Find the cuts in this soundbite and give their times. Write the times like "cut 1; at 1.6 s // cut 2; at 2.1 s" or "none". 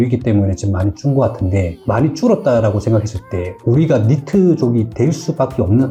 none